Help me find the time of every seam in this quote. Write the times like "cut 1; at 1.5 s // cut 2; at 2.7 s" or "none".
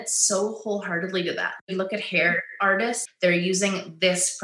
cut 1; at 1.6 s // cut 2; at 3.0 s